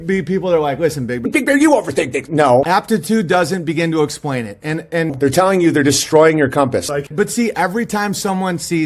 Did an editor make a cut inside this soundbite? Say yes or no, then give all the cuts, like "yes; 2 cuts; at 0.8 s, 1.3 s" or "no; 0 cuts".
no; 0 cuts